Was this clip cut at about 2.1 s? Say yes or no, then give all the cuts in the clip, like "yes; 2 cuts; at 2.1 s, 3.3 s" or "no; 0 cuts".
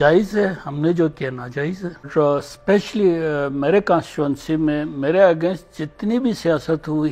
yes; 1 cut; at 2.1 s